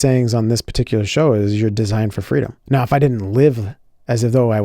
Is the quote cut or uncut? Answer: cut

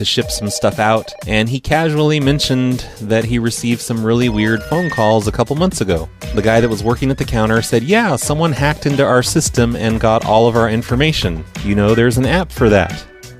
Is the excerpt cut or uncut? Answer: cut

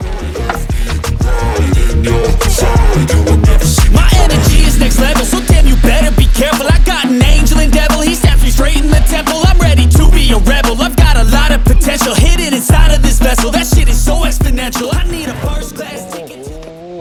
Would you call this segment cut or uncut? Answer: uncut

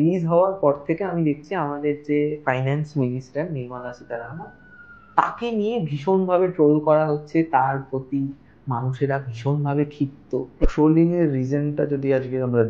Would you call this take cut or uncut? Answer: cut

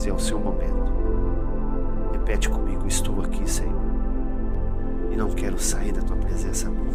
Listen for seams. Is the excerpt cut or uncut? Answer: uncut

